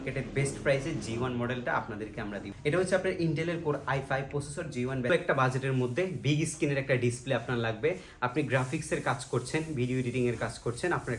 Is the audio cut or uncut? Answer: cut